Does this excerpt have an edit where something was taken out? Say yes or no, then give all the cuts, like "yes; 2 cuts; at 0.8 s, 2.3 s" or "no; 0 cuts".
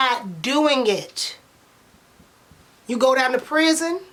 no; 0 cuts